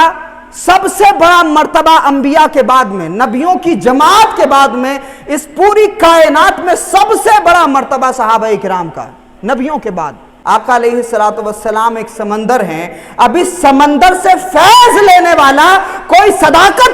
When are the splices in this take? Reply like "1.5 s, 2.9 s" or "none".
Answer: 10.3 s

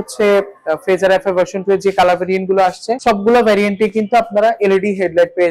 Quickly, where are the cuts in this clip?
none

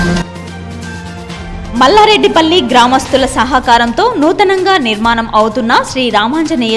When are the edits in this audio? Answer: 1.4 s

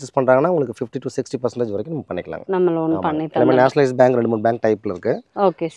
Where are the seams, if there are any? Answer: none

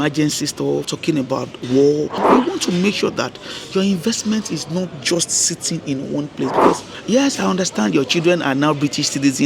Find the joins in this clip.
0.9 s, 2.2 s, 6.9 s

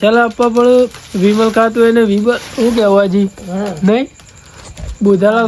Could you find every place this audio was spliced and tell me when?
none

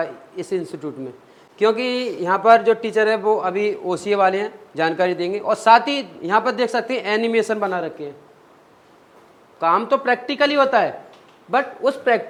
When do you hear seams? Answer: none

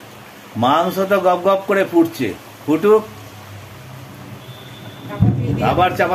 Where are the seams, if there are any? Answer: none

